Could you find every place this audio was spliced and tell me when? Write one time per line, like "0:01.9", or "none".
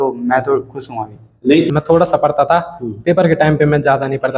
0:01.7